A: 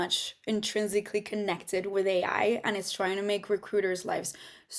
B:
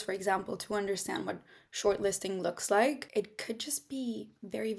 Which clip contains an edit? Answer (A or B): B